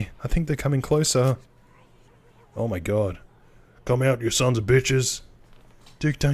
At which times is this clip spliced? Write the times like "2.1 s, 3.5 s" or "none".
none